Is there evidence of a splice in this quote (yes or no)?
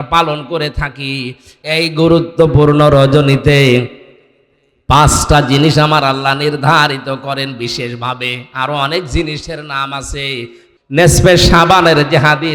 yes